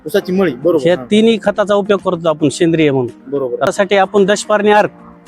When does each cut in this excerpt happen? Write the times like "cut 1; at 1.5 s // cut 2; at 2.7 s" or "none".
cut 1; at 3.7 s